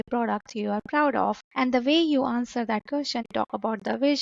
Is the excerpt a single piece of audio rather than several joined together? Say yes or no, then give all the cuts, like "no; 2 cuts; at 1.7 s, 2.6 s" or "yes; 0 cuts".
no; 2 cuts; at 1.4 s, 3.3 s